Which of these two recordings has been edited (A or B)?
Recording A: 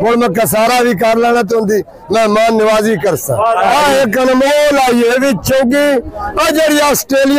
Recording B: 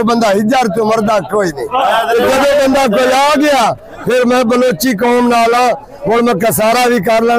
A